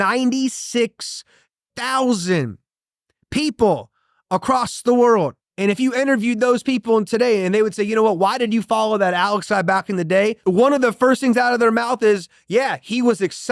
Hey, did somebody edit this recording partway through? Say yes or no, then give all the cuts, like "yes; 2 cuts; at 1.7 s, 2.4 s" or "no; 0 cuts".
yes; 2 cuts; at 5.4 s, 10.4 s